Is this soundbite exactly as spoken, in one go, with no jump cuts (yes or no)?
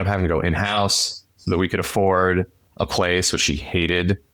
yes